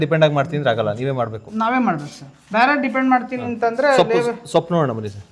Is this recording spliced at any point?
no; 0 cuts

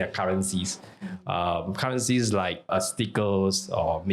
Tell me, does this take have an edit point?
no; 0 cuts

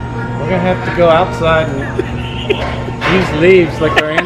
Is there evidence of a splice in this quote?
no; 0 cuts

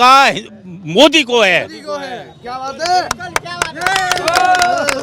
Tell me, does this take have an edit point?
no; 0 cuts

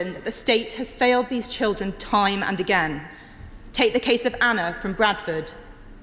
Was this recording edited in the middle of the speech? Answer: no; 0 cuts

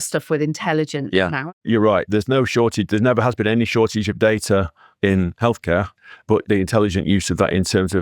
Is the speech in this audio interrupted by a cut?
yes; 2 cuts; at 1.4 s, 6.4 s

